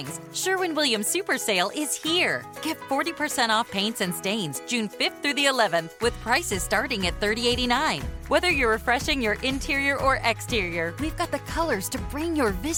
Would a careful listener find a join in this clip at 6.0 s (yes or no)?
no